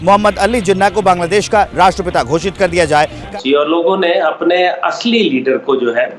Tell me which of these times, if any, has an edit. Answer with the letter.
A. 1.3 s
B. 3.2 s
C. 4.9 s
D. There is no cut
B